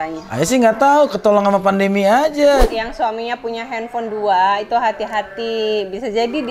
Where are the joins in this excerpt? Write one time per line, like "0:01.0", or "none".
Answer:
0:02.7